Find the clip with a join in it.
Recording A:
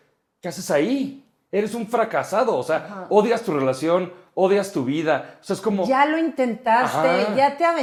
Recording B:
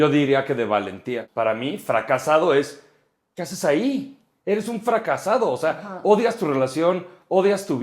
B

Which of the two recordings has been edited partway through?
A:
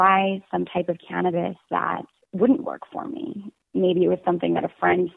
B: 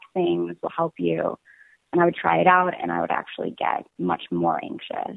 A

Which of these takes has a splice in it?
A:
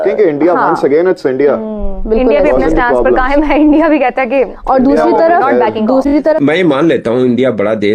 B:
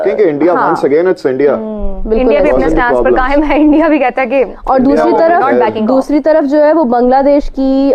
A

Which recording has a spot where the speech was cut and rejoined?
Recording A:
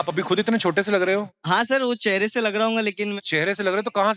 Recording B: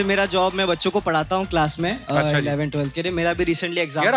A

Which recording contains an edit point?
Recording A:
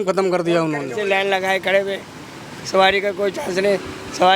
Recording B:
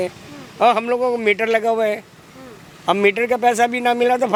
A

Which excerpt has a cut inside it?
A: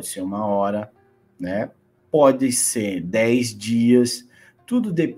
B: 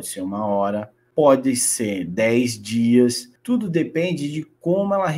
B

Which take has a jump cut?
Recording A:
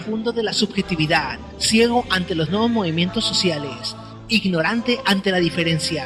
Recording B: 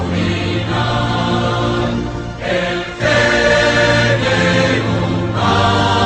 B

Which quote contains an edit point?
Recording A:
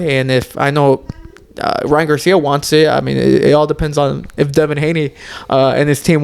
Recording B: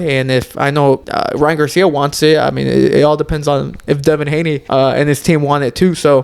B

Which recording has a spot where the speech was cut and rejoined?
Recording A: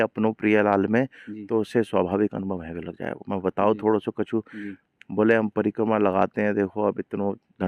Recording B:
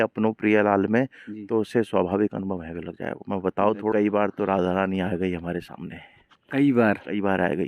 B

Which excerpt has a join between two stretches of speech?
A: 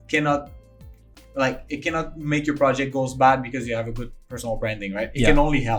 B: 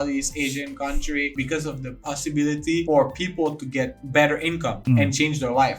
B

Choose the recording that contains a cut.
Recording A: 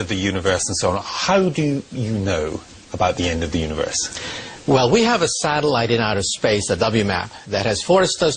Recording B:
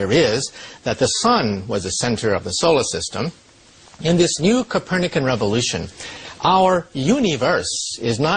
A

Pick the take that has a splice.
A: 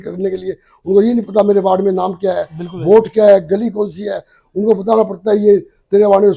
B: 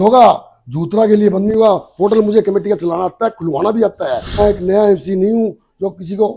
B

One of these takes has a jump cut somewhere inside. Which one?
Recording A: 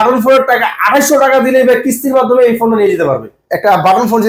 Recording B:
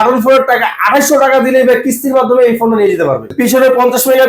B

